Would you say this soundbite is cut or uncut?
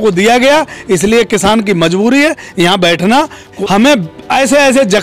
cut